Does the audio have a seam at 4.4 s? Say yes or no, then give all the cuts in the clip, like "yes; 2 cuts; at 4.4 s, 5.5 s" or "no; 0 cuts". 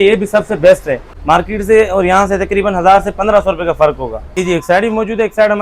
yes; 2 cuts; at 1.1 s, 4.4 s